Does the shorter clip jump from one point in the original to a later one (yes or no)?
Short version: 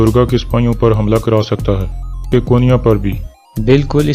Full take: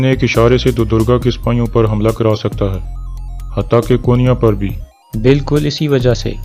yes